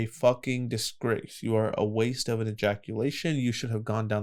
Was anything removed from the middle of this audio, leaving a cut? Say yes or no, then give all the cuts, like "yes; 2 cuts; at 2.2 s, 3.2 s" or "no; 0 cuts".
no; 0 cuts